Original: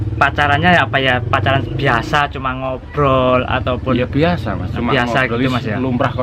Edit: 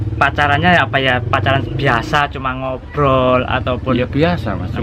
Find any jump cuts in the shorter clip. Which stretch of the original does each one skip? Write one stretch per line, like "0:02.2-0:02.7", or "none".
none